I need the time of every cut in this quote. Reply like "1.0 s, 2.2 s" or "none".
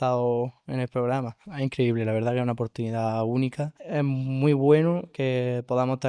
1.4 s, 3.8 s